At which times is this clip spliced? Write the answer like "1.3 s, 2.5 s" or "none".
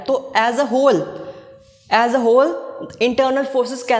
none